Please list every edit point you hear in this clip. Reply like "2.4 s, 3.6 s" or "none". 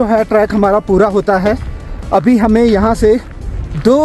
none